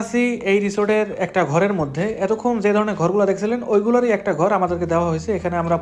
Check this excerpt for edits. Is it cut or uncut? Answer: uncut